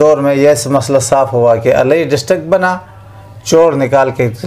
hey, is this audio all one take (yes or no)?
yes